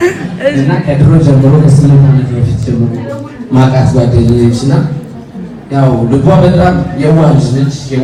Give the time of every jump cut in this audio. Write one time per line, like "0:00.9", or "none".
none